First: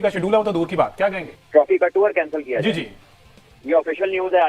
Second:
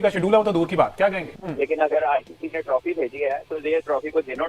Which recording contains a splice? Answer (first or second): second